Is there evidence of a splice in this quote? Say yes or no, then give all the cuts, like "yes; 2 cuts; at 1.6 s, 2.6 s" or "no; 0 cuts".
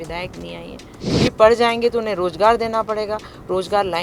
yes; 1 cut; at 1.0 s